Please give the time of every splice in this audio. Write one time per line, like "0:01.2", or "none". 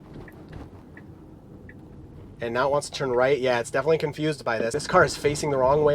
0:04.7